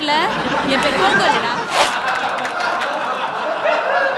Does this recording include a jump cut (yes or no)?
yes